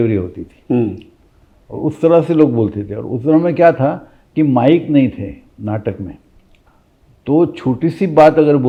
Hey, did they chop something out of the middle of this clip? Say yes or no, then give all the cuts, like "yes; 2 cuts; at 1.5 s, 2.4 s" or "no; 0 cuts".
no; 0 cuts